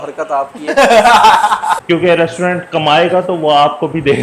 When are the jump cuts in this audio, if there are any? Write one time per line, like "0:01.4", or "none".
0:01.8